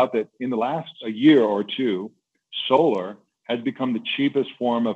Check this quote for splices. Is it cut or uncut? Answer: cut